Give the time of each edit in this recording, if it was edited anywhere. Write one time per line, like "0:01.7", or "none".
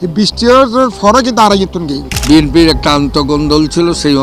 0:02.2